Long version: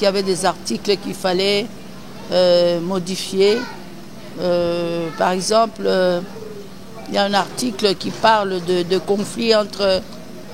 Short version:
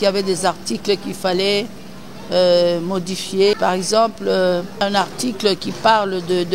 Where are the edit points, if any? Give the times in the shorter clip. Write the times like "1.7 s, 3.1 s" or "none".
3.6 s, 4.8 s